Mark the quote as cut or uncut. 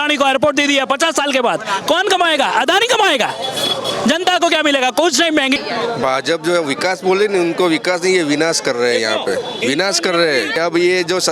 cut